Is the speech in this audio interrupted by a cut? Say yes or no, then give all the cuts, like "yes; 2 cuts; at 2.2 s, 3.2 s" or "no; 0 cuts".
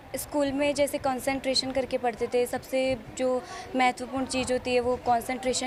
no; 0 cuts